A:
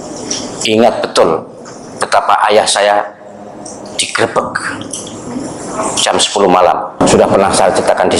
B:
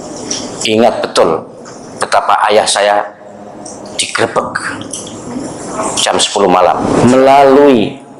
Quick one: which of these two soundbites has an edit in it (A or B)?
B